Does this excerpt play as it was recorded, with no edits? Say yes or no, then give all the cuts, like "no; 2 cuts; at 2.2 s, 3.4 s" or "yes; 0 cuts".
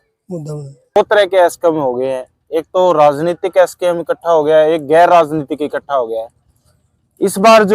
no; 1 cut; at 1.0 s